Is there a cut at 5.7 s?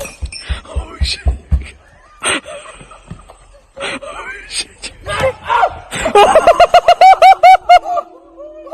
no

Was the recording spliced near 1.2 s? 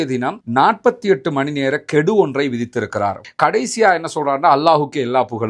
no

